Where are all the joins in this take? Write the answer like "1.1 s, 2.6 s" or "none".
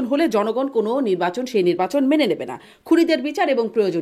none